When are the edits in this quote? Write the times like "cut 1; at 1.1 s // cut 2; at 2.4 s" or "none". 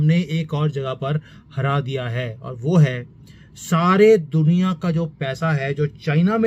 none